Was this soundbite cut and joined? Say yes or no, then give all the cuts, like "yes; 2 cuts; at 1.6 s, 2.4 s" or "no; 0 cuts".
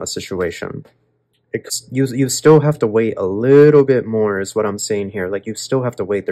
yes; 1 cut; at 1.7 s